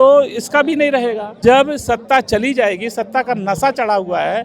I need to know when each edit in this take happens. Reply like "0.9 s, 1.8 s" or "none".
1.3 s